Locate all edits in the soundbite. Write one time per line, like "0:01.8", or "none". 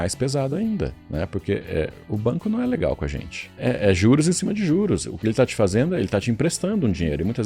0:01.0
0:02.0
0:03.6